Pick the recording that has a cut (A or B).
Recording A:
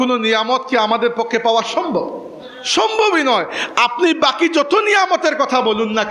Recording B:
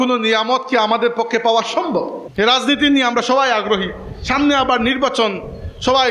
B